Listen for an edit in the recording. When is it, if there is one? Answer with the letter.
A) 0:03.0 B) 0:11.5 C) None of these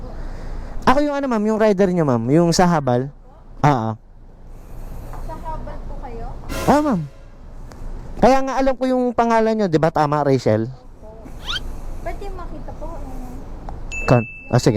C